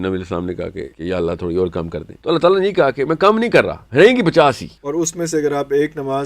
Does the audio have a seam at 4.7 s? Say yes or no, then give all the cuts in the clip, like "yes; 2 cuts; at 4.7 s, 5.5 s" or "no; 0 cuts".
yes; 4 cuts; at 0.9 s, 2.0 s, 3.8 s, 4.7 s